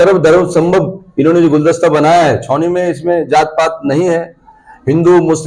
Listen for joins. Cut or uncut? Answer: uncut